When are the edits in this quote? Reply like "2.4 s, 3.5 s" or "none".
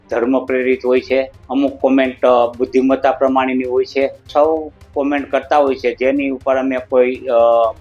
1.4 s, 4.2 s